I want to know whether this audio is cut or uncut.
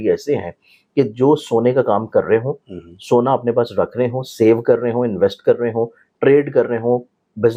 uncut